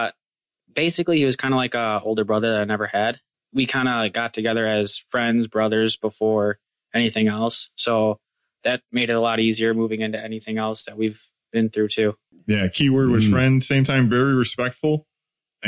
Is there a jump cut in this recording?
yes; 2 cuts; at 3.3 s, 12.3 s

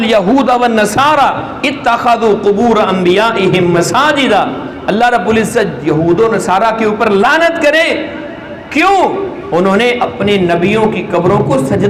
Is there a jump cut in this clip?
no; 0 cuts

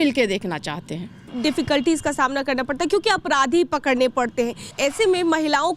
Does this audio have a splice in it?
yes; 2 cuts; at 1.3 s, 4.7 s

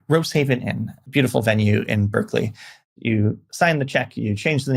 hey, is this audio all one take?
no; 2 cuts; at 0.9 s, 2.8 s

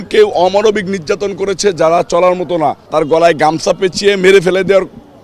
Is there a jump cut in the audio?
yes; 1 cut; at 2.8 s

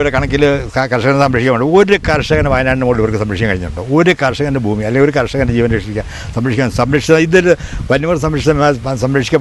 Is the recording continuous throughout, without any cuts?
yes; 0 cuts

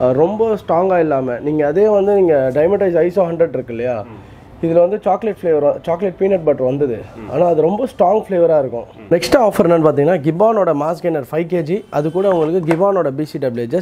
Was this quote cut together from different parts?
yes; 1 cut; at 8.9 s

